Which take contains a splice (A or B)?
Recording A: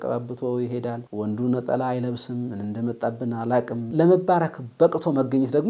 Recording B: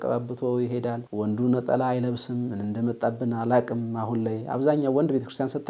A